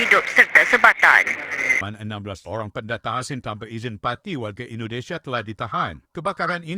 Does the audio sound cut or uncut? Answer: cut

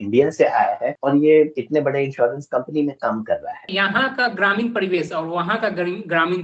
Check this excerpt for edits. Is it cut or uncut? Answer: cut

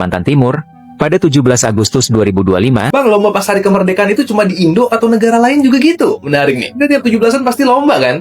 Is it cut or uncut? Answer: cut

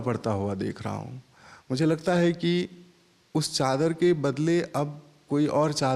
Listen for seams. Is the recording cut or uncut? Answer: uncut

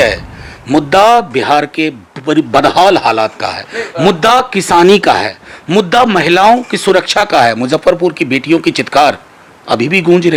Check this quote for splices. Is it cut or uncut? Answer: uncut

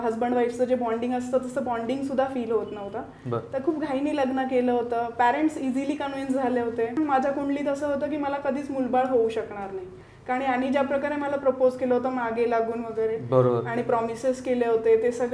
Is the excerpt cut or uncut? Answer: cut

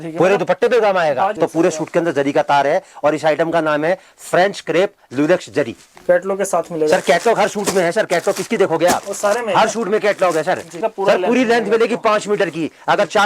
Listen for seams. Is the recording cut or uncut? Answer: cut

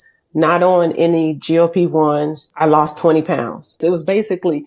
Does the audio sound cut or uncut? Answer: cut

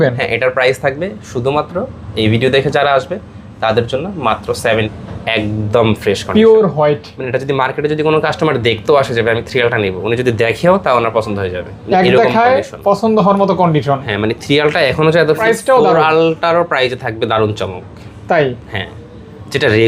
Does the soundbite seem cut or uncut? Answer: cut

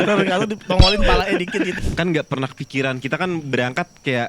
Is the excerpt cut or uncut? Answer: cut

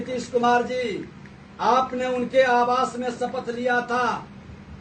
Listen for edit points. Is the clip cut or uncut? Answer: uncut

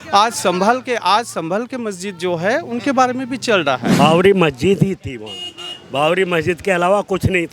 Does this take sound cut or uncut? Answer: cut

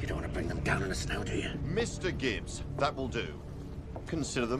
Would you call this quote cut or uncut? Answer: uncut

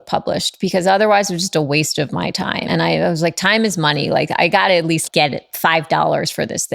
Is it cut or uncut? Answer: cut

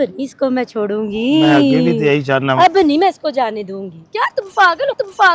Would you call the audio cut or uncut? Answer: uncut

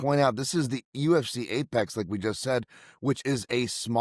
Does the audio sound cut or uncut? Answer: uncut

